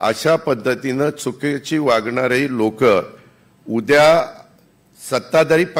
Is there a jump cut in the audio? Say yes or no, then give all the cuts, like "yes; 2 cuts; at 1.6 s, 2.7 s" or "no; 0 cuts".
no; 0 cuts